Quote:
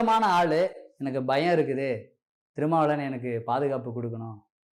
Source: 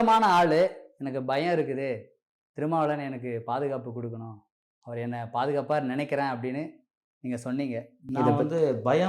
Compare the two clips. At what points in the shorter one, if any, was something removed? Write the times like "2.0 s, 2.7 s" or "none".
none

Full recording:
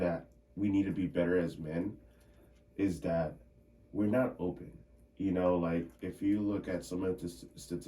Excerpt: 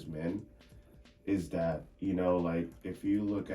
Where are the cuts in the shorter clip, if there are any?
1.9 s

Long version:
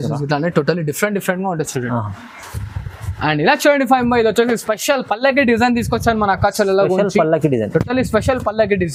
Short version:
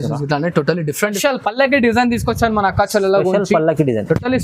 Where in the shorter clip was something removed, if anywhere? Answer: 1.2 s

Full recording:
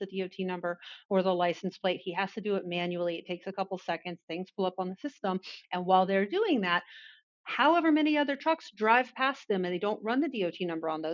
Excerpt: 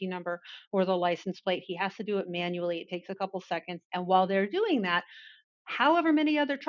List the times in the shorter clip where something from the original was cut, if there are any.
3.8 s

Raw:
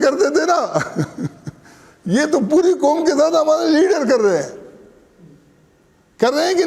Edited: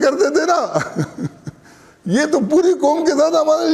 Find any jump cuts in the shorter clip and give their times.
none

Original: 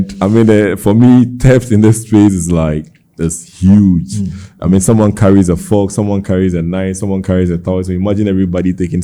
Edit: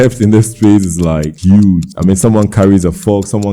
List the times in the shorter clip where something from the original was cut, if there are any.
1.3 s, 1.9 s

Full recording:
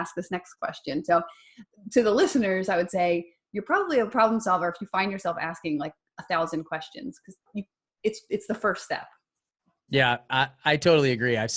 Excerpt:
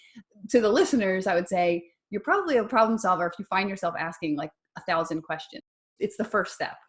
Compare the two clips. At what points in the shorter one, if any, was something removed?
5.9 s

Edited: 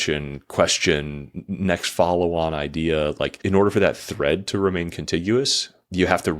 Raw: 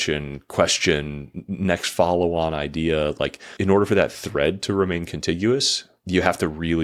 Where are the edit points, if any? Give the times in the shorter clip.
3.3 s

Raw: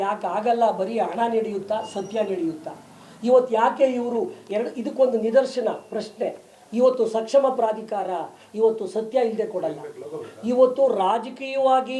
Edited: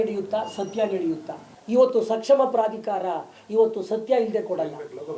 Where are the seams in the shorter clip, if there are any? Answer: 1.5 s

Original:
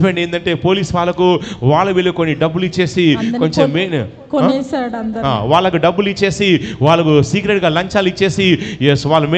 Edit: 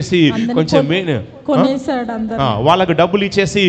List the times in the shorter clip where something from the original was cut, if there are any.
none

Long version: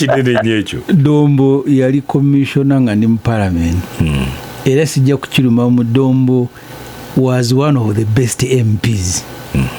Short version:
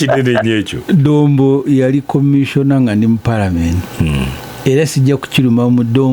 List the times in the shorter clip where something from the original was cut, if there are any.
none

